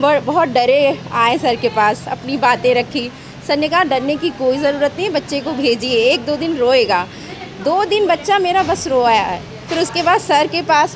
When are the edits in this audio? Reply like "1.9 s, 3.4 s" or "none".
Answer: none